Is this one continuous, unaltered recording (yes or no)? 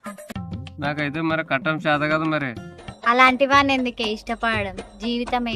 no